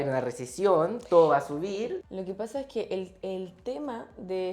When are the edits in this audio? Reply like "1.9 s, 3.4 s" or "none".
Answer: 2.1 s